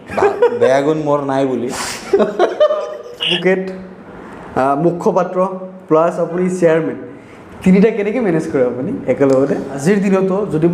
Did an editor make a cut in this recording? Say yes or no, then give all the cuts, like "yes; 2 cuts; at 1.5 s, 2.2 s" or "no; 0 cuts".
yes; 2 cuts; at 3.3 s, 9.8 s